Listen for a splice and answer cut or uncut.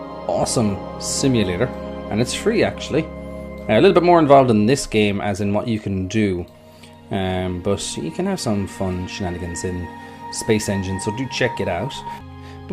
cut